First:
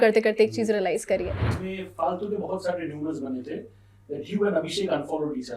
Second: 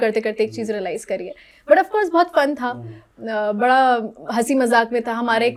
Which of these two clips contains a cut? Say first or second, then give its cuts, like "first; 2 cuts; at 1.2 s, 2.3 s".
first; 1 cut; at 1.5 s